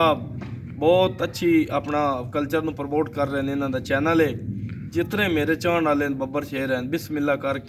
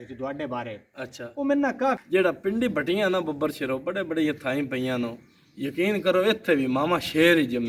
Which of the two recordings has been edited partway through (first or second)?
second